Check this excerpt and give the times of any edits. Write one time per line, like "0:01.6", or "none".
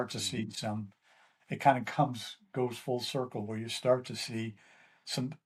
none